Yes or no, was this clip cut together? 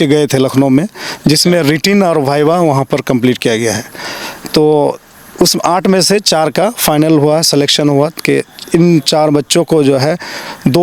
no